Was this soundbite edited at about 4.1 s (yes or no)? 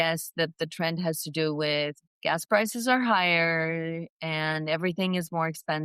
no